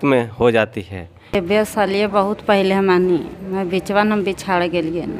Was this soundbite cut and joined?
yes; 1 cut; at 1.3 s

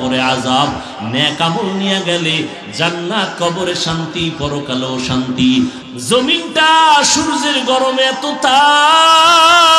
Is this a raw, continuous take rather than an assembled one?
no; 1 cut; at 5.8 s

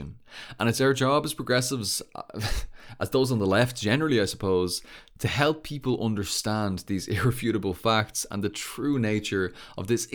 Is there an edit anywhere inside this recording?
no; 0 cuts

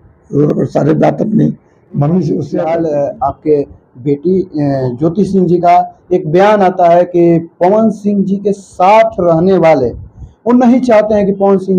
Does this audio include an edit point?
yes; 1 cut; at 2.5 s

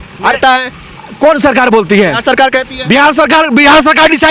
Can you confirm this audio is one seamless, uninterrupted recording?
yes; 0 cuts

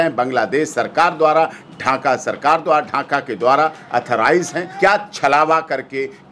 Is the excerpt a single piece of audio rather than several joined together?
no; 1 cut; at 4.6 s

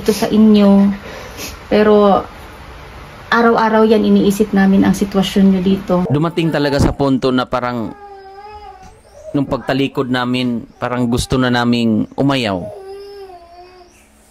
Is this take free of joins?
no; 1 cut; at 6.1 s

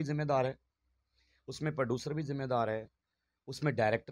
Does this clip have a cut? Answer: no; 0 cuts

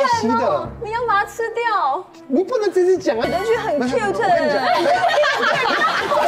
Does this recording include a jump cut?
yes; 1 cut; at 3.2 s

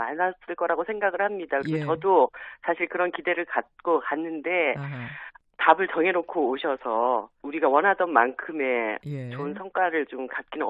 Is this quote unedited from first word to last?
yes; 0 cuts

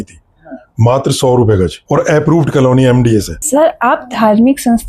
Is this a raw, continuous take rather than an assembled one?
no; 2 cuts; at 1.8 s, 3.3 s

